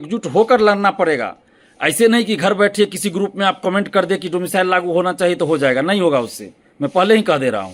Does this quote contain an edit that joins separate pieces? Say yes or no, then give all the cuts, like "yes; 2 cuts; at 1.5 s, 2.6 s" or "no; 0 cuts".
no; 0 cuts